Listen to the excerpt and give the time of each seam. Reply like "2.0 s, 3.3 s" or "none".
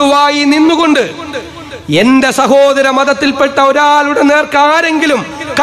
none